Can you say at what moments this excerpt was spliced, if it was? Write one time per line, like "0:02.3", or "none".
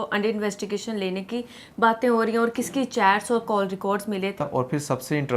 0:04.4